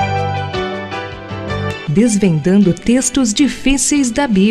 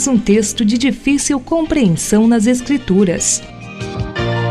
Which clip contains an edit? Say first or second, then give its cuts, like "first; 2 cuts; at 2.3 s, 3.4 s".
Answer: second; 1 cut; at 3.3 s